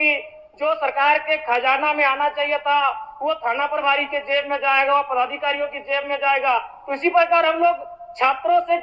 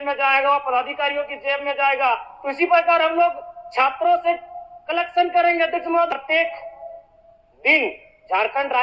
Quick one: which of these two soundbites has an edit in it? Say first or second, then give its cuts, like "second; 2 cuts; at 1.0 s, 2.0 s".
second; 1 cut; at 6.1 s